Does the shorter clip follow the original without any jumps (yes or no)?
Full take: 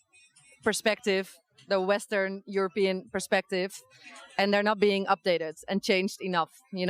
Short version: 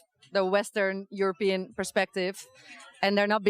yes